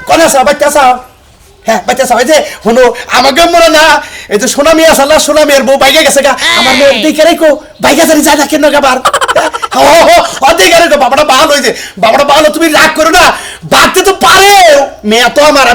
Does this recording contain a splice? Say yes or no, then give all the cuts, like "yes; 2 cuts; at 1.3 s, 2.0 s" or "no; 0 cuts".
no; 0 cuts